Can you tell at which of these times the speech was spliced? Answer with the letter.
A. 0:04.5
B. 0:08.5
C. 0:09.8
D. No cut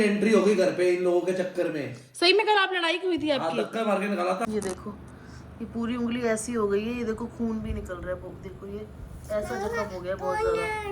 A